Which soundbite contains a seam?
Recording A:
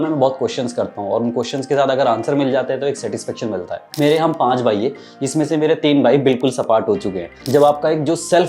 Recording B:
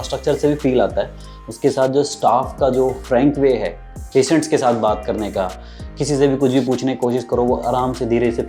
A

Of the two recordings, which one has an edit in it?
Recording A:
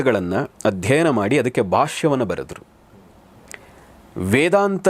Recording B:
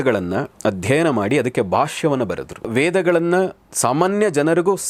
B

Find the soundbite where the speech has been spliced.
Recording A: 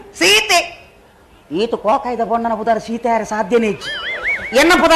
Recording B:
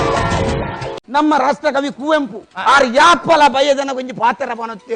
B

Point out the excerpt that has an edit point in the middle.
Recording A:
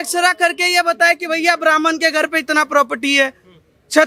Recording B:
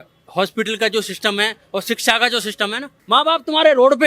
B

